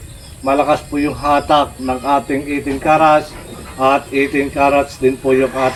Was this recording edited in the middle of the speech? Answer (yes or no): no